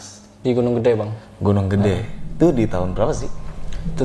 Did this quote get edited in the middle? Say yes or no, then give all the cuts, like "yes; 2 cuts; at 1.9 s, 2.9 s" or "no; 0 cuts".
no; 0 cuts